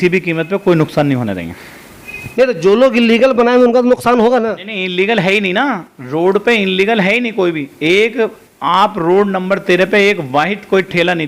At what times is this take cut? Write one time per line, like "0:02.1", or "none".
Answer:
none